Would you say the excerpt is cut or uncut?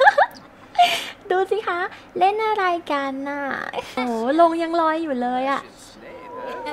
cut